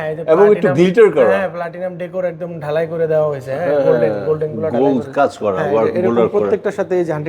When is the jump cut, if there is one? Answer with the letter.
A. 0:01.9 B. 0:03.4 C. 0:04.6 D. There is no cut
D